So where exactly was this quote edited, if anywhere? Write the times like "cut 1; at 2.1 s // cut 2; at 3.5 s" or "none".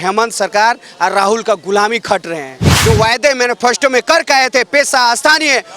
cut 1; at 2.7 s